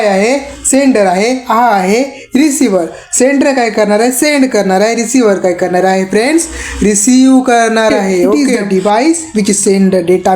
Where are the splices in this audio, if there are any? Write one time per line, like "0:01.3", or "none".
0:08.3